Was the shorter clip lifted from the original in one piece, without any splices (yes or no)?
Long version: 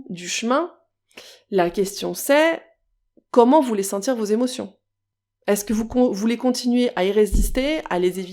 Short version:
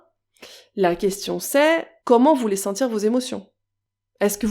no